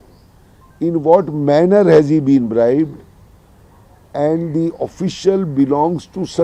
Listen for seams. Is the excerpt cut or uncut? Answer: uncut